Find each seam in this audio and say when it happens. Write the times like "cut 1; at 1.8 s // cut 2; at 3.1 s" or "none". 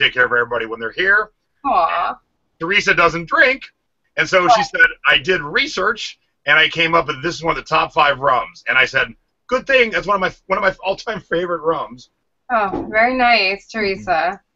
none